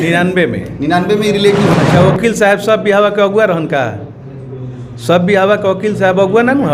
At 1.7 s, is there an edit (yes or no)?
yes